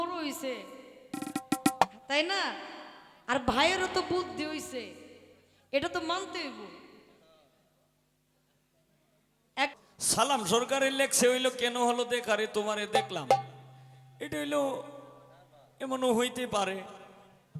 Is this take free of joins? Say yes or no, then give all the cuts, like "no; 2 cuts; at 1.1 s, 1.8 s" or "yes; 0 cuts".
no; 1 cut; at 9.7 s